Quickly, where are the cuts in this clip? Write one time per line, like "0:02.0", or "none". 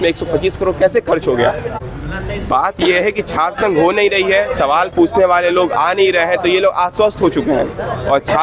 0:01.9